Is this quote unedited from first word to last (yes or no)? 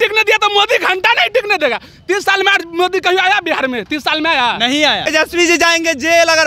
no